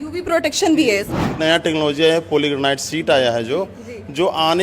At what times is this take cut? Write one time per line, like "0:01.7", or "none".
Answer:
0:01.3